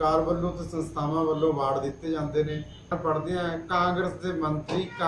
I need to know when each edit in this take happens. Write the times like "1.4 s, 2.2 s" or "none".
3.0 s